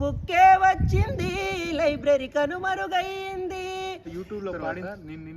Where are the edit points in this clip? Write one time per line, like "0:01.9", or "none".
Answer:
0:04.4